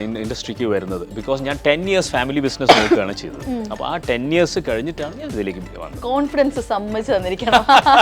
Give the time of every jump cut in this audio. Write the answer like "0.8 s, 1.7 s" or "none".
5.9 s